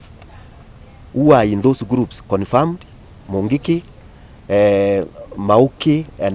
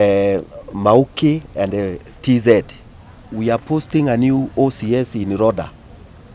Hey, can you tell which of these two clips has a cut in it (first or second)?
second